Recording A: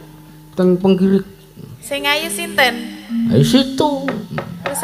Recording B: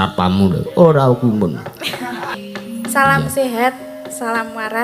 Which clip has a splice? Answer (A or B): B